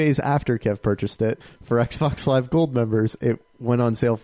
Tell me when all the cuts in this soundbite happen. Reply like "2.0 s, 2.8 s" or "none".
1.5 s